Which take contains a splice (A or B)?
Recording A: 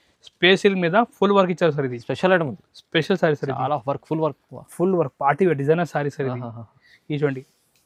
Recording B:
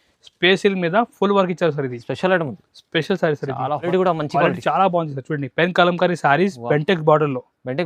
B